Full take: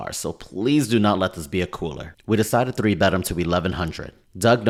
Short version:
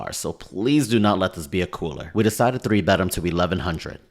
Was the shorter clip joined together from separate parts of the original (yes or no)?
yes